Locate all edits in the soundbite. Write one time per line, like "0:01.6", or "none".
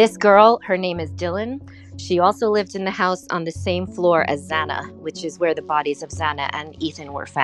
none